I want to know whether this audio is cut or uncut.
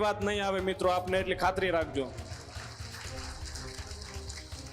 uncut